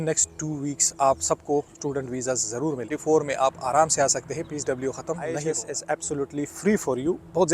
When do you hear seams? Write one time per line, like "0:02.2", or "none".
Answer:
0:02.9
0:05.5